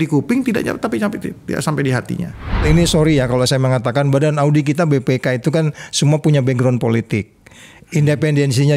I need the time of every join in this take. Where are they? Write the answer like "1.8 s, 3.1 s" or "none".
2.6 s